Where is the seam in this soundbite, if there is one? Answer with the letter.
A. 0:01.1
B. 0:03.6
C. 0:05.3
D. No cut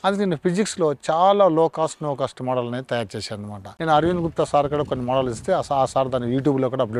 B